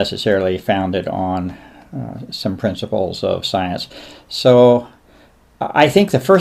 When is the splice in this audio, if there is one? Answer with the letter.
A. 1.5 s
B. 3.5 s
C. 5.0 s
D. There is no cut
B